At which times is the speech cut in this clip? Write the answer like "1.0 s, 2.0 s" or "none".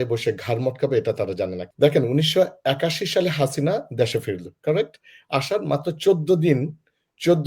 1.6 s